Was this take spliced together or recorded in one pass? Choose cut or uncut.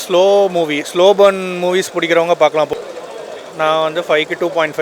cut